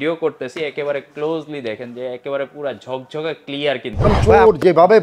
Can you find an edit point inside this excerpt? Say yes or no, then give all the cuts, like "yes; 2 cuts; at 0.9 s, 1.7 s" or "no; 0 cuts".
yes; 1 cut; at 4.1 s